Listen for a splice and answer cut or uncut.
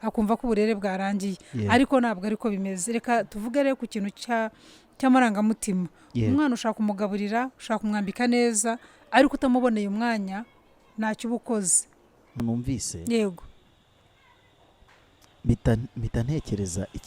cut